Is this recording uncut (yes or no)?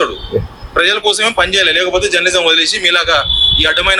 yes